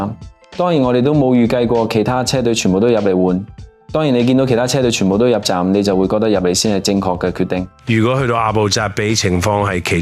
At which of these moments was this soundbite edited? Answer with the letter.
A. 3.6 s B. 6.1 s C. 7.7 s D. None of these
C